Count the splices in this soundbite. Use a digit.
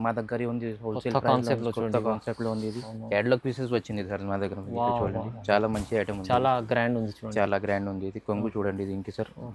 1